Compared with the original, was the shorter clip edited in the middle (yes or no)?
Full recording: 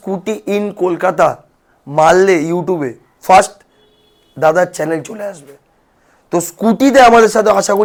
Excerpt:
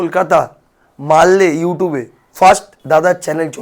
yes